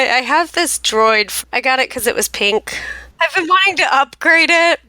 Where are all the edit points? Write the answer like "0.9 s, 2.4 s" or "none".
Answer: 1.3 s, 3.5 s

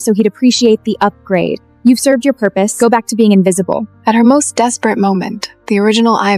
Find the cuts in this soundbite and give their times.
none

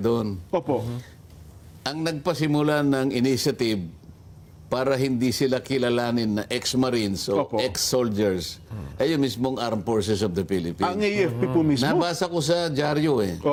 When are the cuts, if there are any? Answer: none

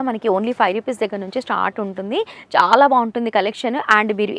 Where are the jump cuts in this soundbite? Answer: none

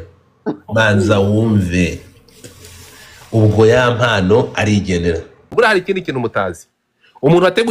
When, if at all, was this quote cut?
5.5 s

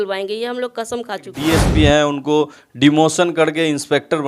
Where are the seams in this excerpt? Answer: 1.3 s

